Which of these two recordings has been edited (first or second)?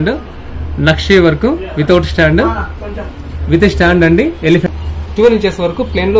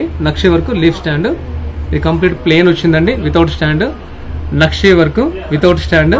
first